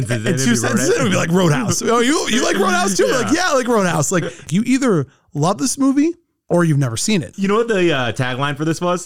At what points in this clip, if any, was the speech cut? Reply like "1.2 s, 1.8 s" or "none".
4.5 s, 7.3 s